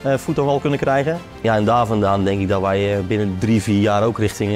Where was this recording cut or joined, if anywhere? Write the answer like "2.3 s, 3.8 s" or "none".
1.3 s